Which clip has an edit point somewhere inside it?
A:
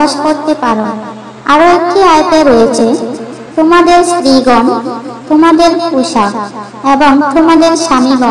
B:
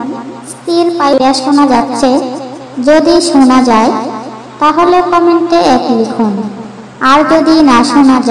B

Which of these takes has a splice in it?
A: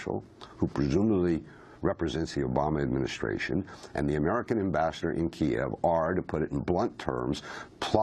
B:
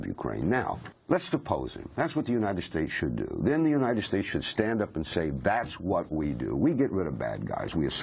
B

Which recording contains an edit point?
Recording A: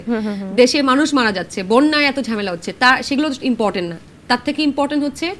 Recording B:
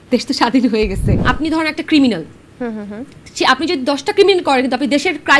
B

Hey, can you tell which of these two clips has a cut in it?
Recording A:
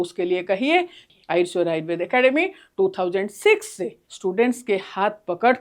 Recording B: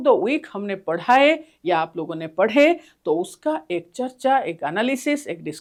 A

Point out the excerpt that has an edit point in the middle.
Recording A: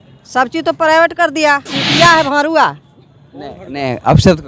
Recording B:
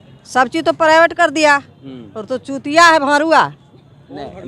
A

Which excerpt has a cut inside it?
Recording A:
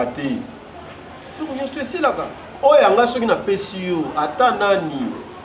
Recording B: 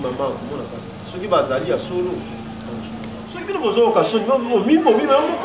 B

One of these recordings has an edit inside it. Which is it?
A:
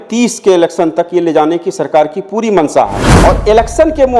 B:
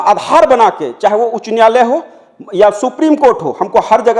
A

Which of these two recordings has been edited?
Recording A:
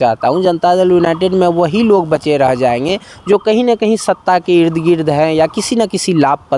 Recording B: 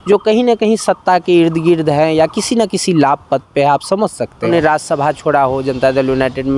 B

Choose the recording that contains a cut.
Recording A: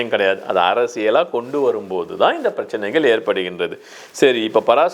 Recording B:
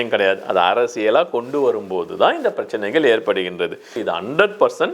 B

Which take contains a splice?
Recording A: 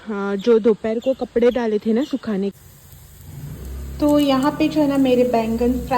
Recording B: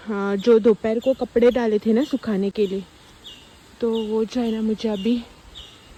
A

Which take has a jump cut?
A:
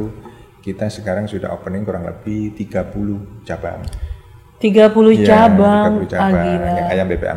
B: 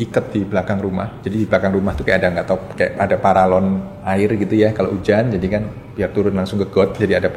B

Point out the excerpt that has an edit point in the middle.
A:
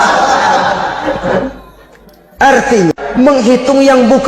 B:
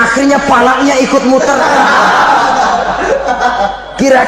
A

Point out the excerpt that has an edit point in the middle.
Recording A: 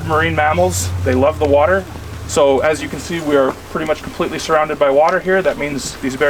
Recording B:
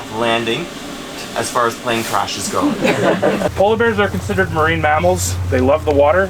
B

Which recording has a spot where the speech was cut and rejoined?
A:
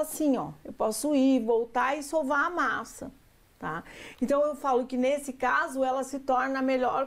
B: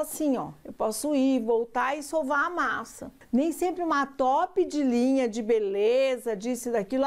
B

